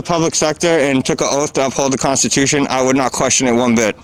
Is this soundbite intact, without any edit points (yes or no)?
yes